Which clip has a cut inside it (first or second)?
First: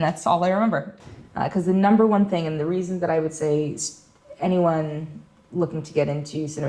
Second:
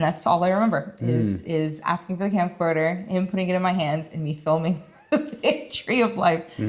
first